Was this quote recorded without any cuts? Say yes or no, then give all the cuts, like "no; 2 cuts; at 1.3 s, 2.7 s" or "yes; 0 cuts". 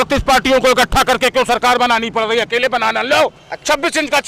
yes; 0 cuts